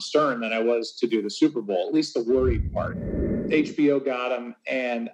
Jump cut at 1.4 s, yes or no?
no